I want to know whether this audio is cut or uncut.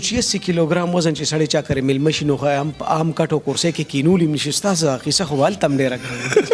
uncut